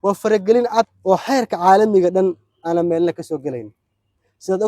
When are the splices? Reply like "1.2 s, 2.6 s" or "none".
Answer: 0.9 s